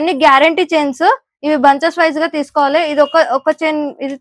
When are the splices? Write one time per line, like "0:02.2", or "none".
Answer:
none